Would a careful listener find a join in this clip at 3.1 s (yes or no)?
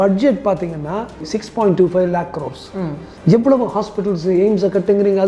no